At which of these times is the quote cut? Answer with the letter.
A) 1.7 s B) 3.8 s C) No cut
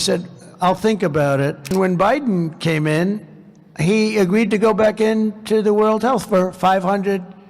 A